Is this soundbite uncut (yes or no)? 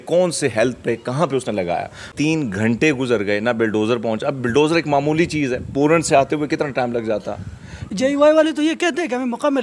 no